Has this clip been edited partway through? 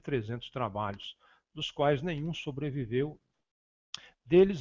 no; 0 cuts

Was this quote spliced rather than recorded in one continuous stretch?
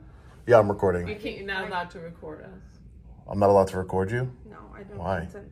no; 0 cuts

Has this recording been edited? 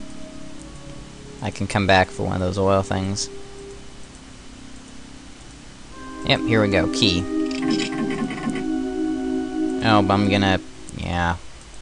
no; 0 cuts

